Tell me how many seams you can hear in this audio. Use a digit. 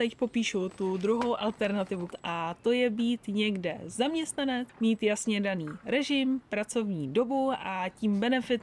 2